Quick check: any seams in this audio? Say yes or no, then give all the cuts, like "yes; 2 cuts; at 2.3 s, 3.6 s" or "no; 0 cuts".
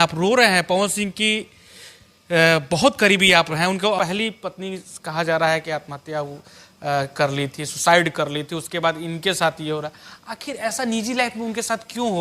yes; 1 cut; at 4.0 s